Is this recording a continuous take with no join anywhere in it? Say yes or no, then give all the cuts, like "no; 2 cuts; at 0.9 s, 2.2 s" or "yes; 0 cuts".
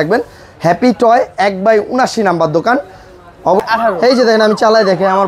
no; 1 cut; at 3.6 s